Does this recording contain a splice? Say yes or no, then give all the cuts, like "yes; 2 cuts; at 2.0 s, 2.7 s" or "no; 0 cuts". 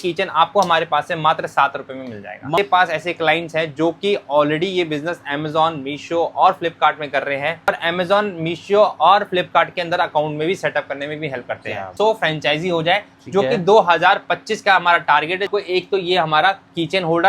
yes; 4 cuts; at 2.6 s, 7.7 s, 11.9 s, 15.5 s